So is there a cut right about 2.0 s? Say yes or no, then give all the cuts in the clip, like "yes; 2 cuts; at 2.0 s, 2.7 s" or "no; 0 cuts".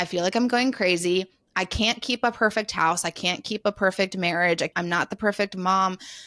no; 1 cut; at 4.7 s